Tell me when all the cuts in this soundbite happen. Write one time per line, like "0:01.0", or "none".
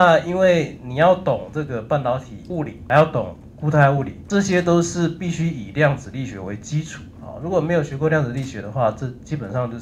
0:02.8
0:04.2